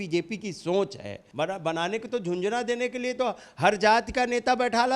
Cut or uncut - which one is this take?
cut